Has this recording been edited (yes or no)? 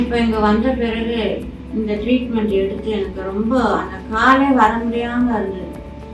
no